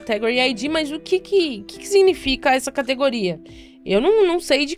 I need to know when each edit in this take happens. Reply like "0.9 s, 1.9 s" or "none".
none

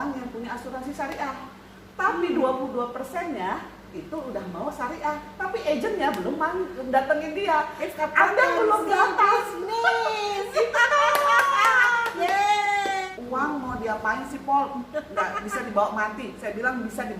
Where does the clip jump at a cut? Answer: 13.1 s

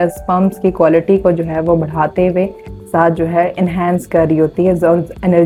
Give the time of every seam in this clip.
none

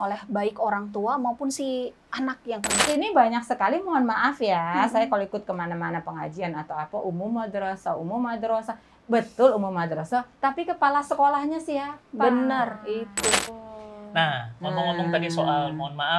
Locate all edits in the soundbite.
2.8 s, 13.5 s

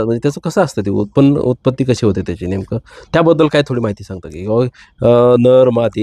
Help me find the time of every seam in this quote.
none

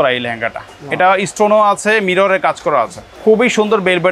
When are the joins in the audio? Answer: none

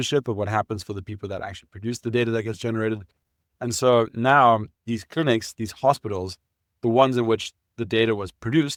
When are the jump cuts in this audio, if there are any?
none

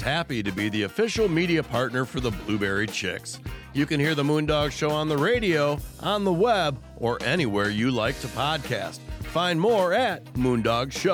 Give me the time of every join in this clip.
none

